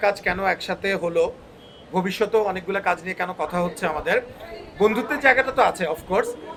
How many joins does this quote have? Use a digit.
0